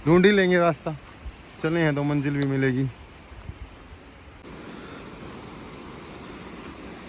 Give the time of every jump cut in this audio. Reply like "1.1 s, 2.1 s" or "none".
none